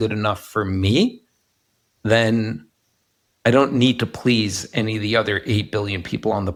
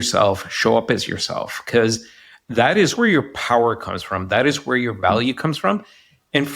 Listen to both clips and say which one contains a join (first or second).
second